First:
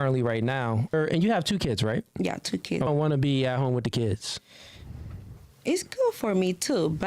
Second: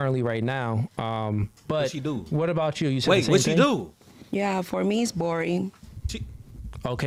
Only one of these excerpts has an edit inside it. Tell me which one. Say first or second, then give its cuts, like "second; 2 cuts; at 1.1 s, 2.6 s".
first; 2 cuts; at 0.9 s, 2.9 s